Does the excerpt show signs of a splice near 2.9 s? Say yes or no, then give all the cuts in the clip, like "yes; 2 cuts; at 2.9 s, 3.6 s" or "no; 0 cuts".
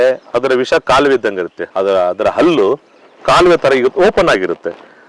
no; 1 cut; at 1.6 s